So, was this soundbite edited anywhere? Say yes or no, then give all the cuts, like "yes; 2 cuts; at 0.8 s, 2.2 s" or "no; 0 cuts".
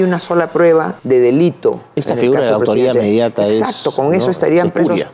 yes; 1 cut; at 1.0 s